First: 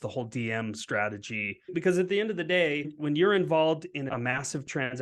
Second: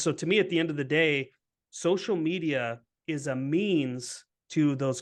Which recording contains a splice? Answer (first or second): first